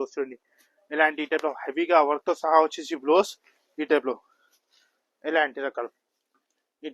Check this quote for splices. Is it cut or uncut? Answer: uncut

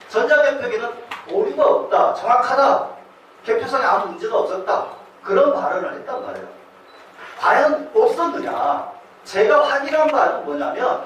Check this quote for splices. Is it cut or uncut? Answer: cut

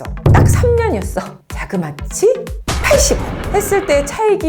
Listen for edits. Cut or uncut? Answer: cut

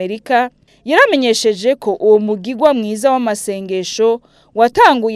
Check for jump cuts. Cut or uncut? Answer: uncut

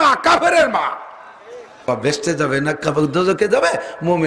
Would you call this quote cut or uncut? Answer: cut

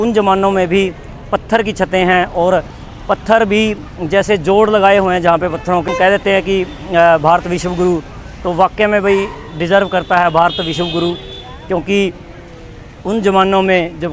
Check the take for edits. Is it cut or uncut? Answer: cut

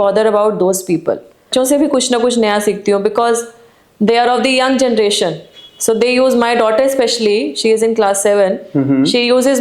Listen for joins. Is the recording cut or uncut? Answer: cut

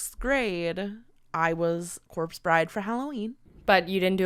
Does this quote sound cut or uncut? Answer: uncut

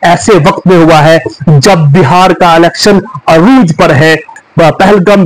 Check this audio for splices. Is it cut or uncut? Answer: cut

